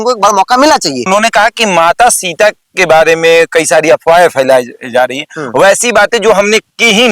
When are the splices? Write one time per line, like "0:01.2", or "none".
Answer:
0:01.1